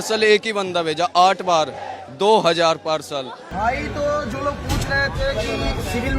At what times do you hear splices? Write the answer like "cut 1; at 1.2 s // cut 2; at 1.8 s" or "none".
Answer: cut 1; at 3.4 s